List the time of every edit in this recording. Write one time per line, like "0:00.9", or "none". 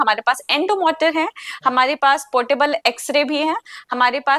none